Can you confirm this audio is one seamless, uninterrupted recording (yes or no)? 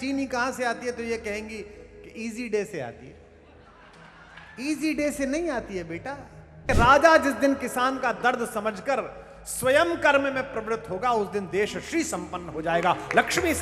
no